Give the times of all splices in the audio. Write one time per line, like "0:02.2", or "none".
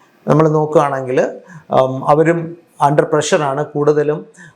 none